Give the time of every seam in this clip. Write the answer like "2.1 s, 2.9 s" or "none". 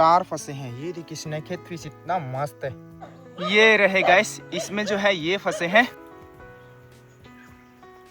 2.9 s, 6.1 s